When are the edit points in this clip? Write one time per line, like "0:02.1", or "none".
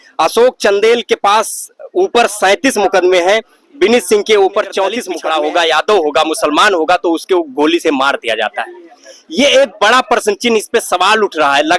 0:05.1